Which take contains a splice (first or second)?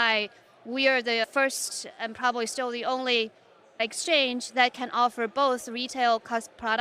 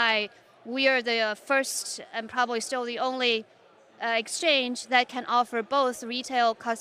first